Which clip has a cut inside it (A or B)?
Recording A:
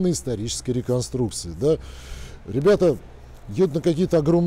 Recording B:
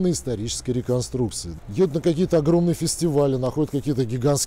B